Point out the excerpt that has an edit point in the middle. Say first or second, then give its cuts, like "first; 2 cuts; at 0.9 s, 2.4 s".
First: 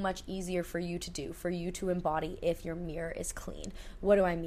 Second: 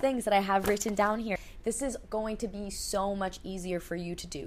second; 1 cut; at 1.4 s